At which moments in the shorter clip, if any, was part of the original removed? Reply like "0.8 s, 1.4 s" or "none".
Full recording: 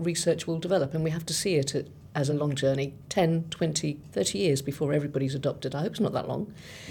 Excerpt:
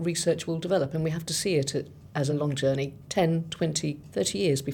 none